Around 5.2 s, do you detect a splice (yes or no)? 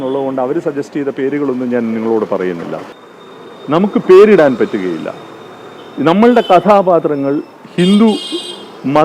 no